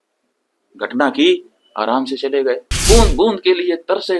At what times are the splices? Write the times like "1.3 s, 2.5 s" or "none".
2.7 s